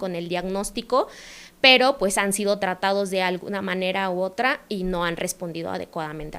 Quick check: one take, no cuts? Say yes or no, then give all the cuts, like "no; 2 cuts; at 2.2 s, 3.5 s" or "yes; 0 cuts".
yes; 0 cuts